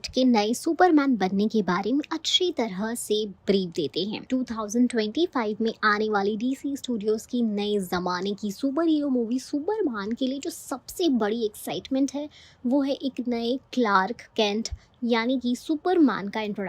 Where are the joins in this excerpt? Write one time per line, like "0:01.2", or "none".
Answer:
0:04.2